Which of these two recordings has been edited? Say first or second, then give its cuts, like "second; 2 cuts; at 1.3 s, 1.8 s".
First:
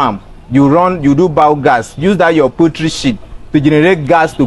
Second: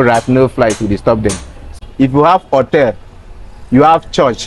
second; 1 cut; at 1.7 s